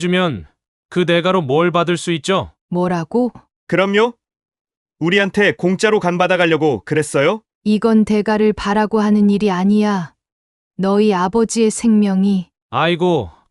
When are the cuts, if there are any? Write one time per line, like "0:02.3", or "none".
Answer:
0:02.6
0:03.5
0:07.5